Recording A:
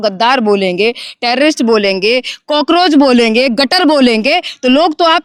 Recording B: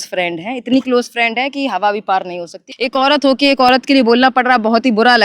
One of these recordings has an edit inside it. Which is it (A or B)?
B